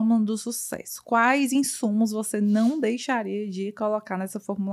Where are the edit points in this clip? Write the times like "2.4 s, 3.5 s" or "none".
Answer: none